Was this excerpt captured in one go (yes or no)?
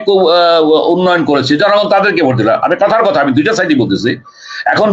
yes